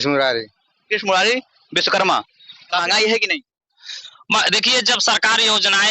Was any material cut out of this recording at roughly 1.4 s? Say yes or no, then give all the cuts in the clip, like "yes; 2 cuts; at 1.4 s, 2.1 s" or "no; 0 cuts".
no; 1 cut; at 2.8 s